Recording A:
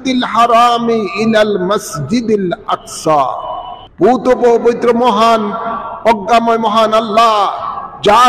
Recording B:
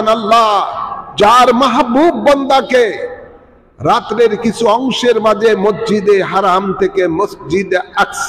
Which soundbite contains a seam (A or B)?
A